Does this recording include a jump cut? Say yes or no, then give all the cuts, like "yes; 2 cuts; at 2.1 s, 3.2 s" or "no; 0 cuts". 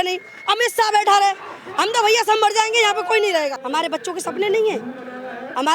yes; 1 cut; at 3.6 s